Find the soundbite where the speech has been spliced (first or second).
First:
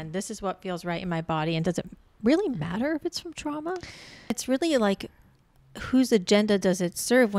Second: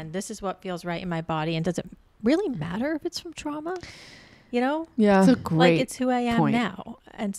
first